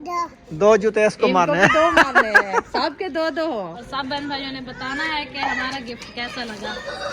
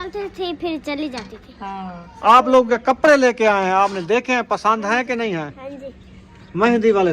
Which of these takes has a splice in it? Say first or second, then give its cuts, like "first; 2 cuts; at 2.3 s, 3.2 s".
first; 1 cut; at 3.8 s